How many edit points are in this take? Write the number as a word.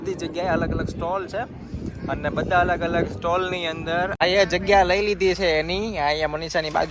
one